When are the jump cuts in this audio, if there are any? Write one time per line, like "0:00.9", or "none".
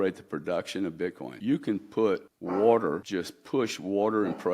0:01.3
0:02.3
0:03.0